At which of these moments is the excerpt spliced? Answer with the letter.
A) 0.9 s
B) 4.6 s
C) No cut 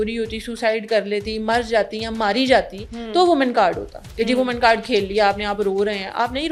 C